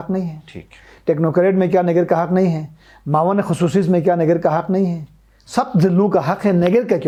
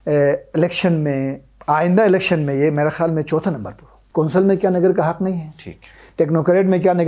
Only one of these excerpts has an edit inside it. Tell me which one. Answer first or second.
second